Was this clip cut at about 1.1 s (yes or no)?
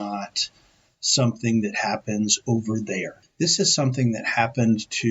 no